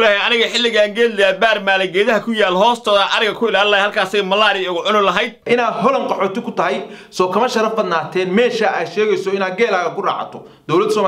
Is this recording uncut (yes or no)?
no